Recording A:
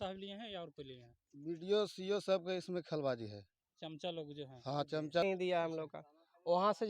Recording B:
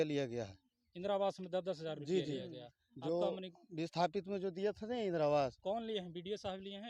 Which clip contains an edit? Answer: A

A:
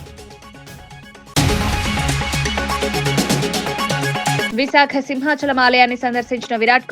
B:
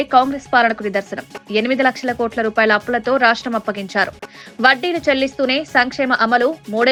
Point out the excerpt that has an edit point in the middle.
A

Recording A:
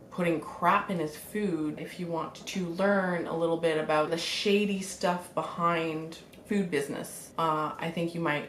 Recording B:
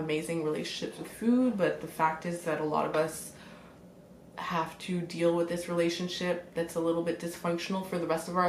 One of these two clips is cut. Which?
A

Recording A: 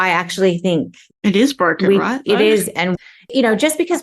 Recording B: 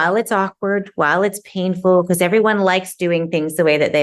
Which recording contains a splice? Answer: A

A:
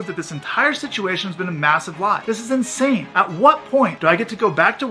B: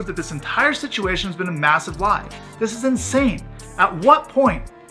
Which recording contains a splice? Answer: A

